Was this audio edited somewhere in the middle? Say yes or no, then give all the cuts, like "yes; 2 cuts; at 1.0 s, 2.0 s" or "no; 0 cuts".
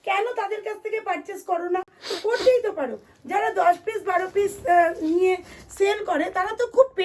no; 0 cuts